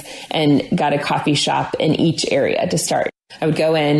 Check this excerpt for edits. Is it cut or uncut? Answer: cut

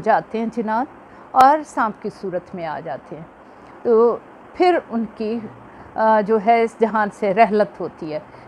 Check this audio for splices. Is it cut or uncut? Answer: uncut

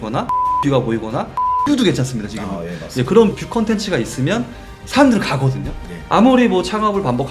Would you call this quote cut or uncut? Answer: cut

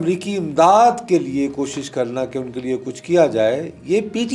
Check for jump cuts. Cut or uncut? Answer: uncut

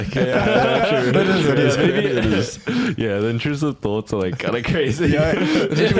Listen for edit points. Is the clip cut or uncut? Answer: uncut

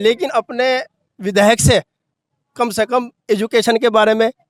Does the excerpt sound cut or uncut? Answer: uncut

